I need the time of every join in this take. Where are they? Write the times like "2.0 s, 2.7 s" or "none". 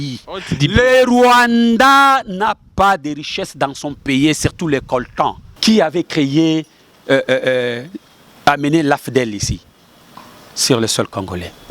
5.7 s